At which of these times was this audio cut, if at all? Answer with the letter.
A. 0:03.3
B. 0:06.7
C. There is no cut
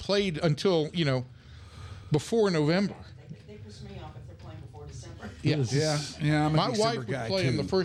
C